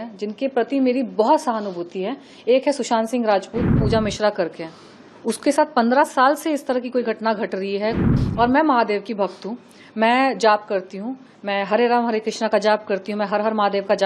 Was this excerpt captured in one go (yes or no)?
no